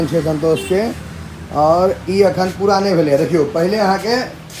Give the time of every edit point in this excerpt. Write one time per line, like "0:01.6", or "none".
none